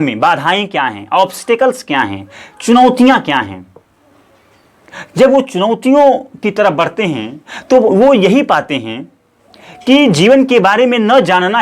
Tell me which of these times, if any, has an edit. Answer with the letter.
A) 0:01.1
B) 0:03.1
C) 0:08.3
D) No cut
D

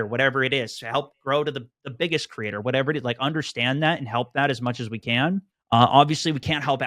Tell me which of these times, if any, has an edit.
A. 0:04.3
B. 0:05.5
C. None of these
B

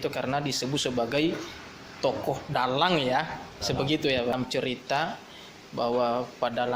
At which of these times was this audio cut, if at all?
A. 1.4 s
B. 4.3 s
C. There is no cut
B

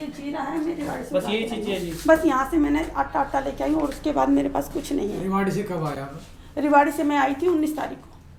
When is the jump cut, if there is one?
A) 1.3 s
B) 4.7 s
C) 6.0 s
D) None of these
D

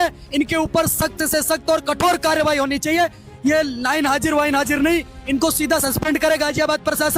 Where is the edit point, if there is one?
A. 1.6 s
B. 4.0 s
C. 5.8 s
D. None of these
C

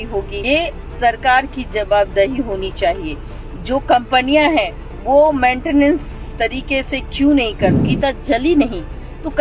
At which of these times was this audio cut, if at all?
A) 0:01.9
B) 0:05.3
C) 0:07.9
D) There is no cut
C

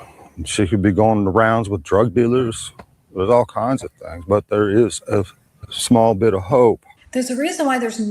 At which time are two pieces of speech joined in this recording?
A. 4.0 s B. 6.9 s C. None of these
B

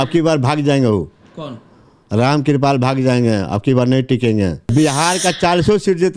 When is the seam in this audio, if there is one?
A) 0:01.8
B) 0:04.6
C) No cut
B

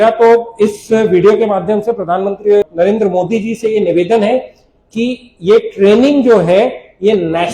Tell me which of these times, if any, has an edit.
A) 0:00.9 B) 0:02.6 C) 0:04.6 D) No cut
B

